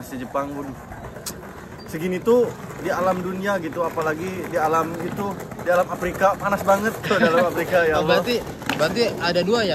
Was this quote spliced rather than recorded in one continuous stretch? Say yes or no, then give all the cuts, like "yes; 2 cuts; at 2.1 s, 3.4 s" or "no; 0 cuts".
no; 0 cuts